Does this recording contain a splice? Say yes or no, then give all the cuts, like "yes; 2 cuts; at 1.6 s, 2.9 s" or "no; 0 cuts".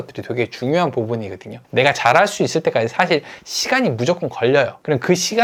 no; 0 cuts